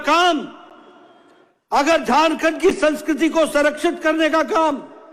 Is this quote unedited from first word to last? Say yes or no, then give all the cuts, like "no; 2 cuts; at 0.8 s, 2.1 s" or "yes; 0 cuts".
yes; 0 cuts